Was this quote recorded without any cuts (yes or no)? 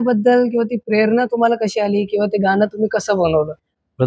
yes